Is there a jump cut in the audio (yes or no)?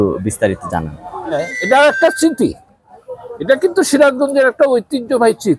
yes